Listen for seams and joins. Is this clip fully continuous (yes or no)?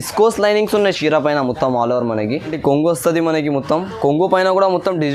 no